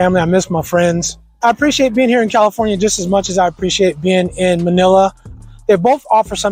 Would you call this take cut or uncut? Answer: uncut